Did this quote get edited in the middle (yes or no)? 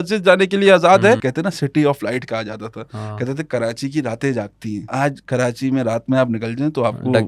yes